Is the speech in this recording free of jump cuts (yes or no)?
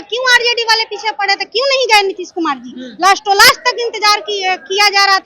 yes